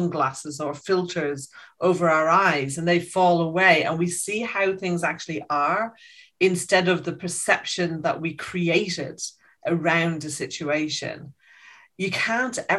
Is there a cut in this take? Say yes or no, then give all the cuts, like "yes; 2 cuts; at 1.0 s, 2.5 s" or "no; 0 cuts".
no; 0 cuts